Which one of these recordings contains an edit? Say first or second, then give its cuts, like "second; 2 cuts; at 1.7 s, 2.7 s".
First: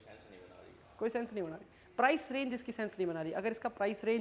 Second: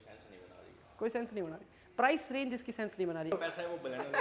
second; 1 cut; at 3.3 s